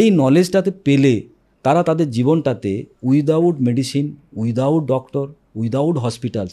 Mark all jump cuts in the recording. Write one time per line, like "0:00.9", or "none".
none